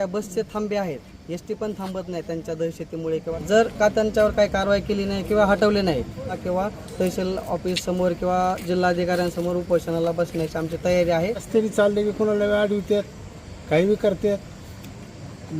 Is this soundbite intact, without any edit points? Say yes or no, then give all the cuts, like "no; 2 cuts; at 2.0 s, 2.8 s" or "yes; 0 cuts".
no; 3 cuts; at 3.3 s, 6.4 s, 11.5 s